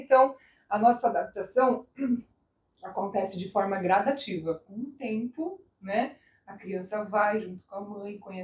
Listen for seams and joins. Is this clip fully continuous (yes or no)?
no